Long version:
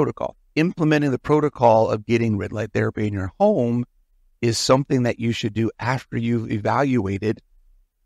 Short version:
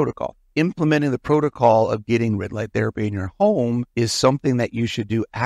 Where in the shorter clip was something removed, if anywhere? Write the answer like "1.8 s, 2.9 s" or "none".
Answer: 3.9 s